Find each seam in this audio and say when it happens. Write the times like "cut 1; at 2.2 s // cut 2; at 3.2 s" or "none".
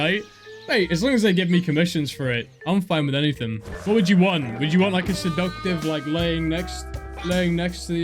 cut 1; at 3.7 s